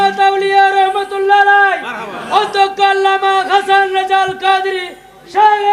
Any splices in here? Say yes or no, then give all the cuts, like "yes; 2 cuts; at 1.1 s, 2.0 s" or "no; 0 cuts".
no; 0 cuts